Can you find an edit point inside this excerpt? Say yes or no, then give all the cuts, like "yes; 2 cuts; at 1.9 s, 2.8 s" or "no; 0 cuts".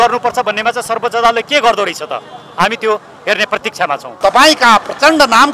yes; 1 cut; at 4.0 s